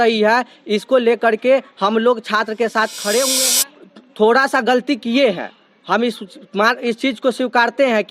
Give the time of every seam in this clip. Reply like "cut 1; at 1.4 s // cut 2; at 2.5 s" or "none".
cut 1; at 3.5 s